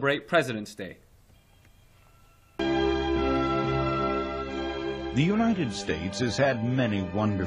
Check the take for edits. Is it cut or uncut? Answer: cut